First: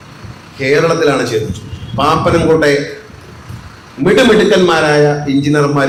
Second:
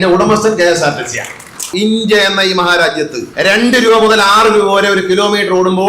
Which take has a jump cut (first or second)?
second